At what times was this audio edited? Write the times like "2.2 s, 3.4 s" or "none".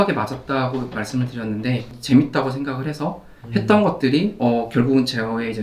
1.9 s

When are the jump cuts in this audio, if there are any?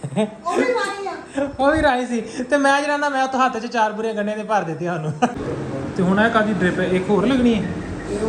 5.3 s

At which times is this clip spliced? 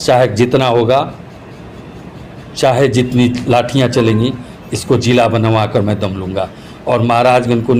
none

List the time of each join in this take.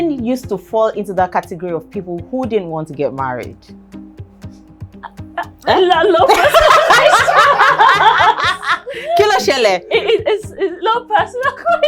none

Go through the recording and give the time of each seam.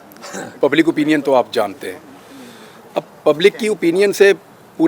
none

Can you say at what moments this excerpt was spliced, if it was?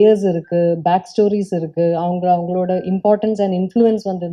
none

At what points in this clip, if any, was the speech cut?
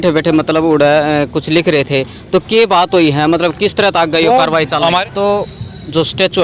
5.0 s

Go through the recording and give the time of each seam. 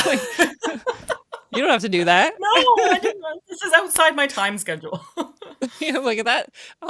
none

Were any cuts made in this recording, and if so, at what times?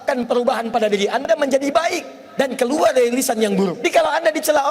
3.8 s

